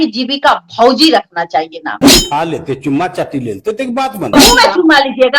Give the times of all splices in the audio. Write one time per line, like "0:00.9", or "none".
0:02.0